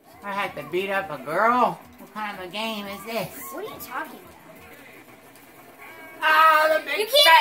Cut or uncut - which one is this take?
cut